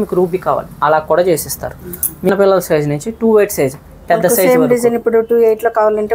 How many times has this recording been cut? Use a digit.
1